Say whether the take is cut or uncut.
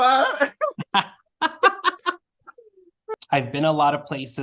cut